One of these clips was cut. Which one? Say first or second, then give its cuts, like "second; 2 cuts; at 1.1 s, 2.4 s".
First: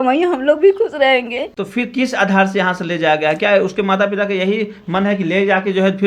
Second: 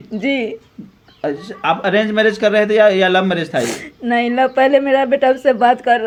first; 1 cut; at 1.5 s